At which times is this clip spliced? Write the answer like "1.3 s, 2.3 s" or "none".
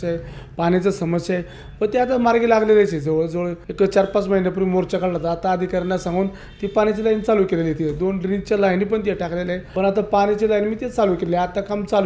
3.6 s, 9.6 s

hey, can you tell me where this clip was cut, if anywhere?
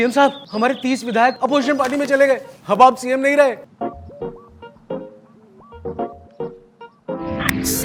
none

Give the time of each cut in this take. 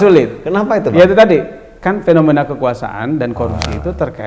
none

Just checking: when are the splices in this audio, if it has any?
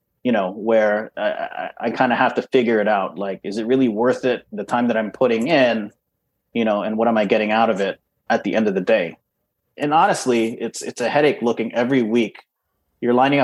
8.2 s, 9.7 s

